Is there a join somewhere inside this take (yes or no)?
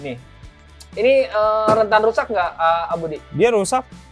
no